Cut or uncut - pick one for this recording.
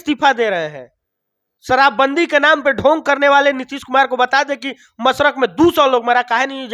uncut